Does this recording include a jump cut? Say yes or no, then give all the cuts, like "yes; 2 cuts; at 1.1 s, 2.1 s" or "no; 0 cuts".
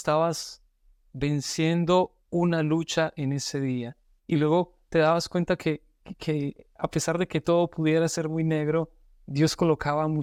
no; 0 cuts